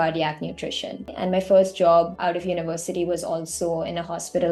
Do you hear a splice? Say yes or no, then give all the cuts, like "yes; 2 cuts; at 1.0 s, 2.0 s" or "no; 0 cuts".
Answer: yes; 2 cuts; at 1.1 s, 2.1 s